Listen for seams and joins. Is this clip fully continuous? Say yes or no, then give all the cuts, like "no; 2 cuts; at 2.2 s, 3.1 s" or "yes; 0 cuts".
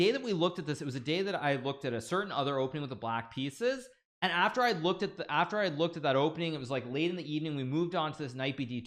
yes; 0 cuts